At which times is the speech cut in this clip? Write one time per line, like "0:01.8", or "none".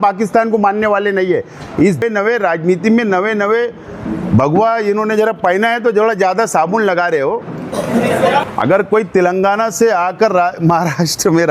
0:02.0
0:08.5